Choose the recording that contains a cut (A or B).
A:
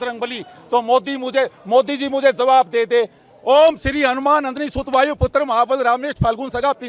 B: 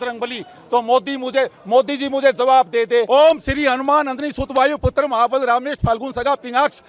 B